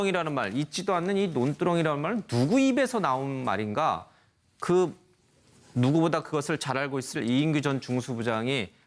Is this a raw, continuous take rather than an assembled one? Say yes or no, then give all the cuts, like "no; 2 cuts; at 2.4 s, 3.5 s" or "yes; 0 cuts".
no; 1 cut; at 1.3 s